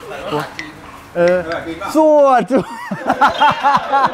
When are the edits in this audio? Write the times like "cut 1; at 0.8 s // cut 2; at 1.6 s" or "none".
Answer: none

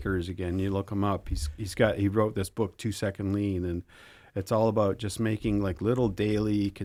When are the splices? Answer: none

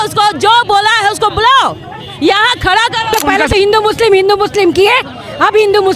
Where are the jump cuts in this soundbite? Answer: cut 1; at 3.2 s

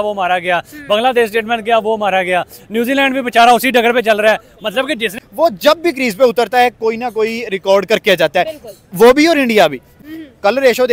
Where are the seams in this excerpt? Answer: cut 1; at 5.2 s // cut 2; at 9.9 s

